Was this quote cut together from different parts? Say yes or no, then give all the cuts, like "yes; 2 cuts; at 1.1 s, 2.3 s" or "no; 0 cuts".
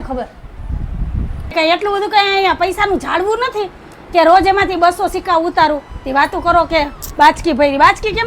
yes; 1 cut; at 1.5 s